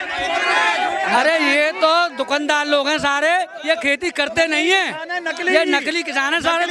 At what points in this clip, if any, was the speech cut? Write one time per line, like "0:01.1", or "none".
none